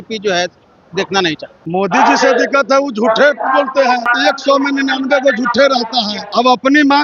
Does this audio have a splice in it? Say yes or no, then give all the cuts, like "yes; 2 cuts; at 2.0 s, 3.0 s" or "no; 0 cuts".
yes; 3 cuts; at 1.6 s, 4.1 s, 6.2 s